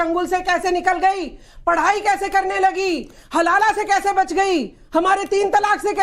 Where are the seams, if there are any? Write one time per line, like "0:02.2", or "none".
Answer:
none